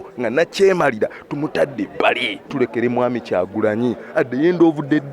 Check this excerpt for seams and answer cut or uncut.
cut